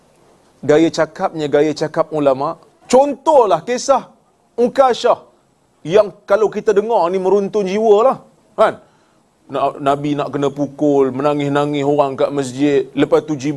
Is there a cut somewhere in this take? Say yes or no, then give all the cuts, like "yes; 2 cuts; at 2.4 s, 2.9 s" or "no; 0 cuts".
yes; 1 cut; at 2.7 s